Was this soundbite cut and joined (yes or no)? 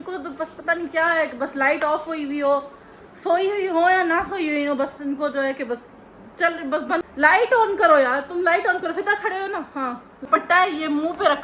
yes